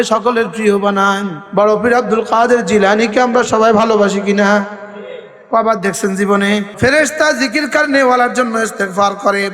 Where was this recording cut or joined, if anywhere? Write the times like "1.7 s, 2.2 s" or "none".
1.4 s, 6.7 s